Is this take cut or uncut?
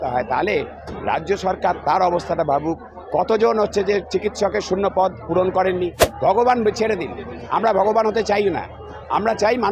cut